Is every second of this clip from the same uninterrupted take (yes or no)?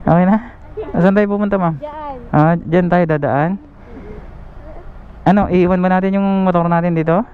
yes